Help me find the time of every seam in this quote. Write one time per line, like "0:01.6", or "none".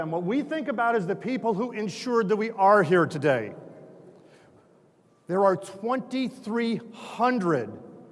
0:03.4